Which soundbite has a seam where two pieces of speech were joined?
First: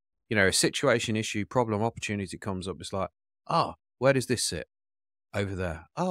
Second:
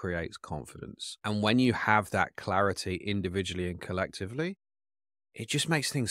second; 1 cut; at 1.0 s

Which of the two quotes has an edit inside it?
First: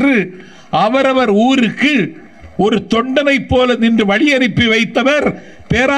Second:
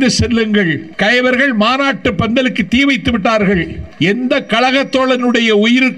second; 2 cuts; at 0.9 s, 3.8 s

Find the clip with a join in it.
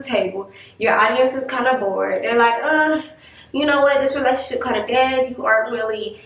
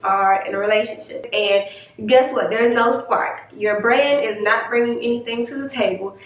second; 1 cut; at 1.3 s

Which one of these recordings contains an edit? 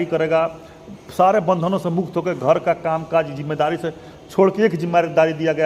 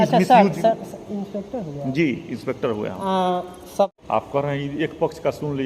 second; 1 cut; at 3.9 s

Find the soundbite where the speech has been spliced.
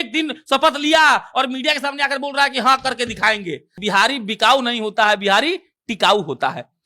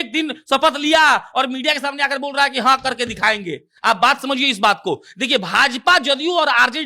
first; 1 cut; at 3.7 s

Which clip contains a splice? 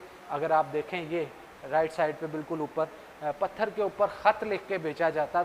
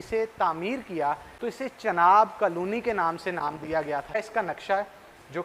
second; 2 cuts; at 1.3 s, 4.2 s

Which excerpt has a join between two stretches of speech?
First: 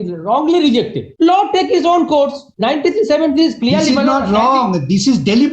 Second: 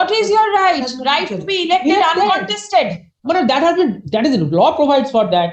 first; 2 cuts; at 1.0 s, 2.4 s

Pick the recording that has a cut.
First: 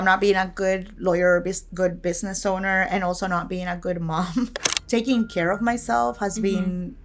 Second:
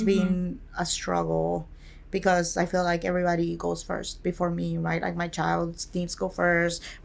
first; 1 cut; at 4.5 s

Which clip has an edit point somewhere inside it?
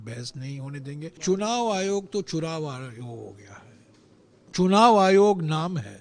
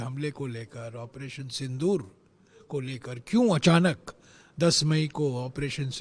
first; 1 cut; at 1.2 s

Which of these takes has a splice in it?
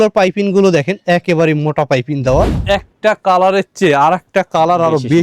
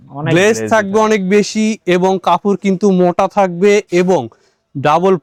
first; 1 cut; at 2.6 s

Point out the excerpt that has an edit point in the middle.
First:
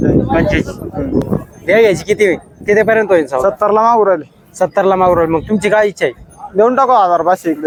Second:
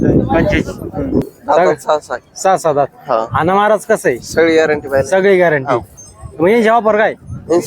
second; 1 cut; at 1.3 s

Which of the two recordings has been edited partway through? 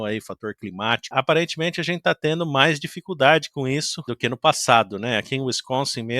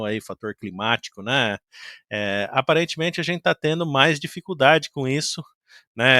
first; 2 cuts; at 1.1 s, 4.1 s

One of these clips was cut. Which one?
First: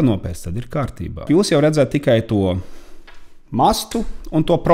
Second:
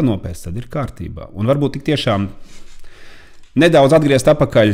first; 1 cut; at 1.3 s

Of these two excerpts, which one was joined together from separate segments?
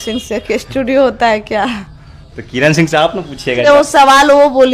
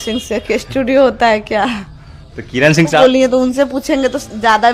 second; 1 cut; at 3.0 s

